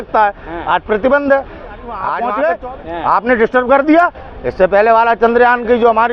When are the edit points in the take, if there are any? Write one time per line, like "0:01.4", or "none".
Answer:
0:02.1